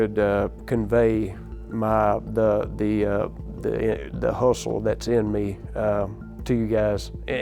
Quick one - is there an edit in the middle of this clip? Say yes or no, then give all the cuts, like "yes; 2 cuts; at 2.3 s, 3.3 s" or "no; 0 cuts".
no; 0 cuts